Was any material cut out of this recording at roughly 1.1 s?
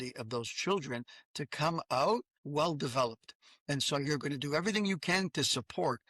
no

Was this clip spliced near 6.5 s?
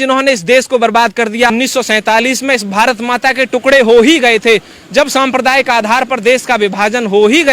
no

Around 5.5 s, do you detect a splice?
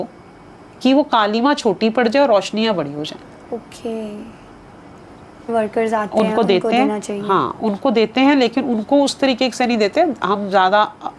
yes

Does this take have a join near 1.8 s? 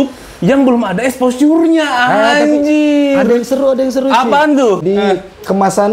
no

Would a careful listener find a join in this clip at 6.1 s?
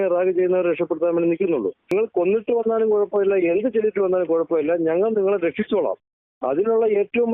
no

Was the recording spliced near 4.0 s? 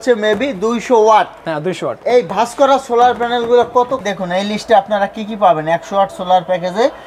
yes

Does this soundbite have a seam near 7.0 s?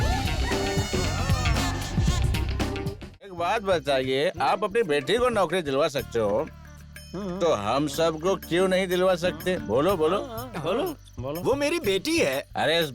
no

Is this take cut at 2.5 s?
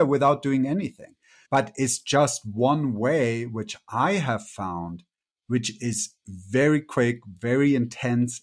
no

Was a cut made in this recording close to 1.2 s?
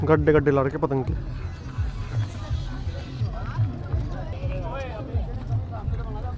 no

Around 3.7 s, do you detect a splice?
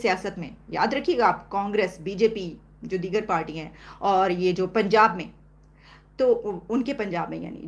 no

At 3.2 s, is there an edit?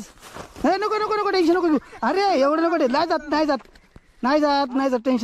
no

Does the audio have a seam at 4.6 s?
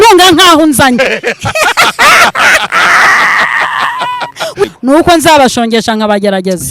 yes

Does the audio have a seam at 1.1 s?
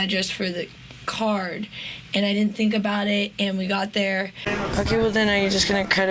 no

